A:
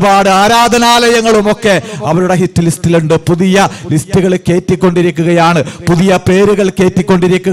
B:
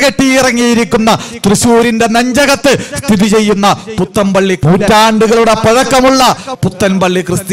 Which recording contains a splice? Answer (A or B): B